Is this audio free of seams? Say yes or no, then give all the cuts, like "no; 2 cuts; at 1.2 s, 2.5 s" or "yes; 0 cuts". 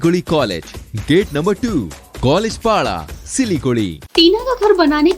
no; 1 cut; at 4.0 s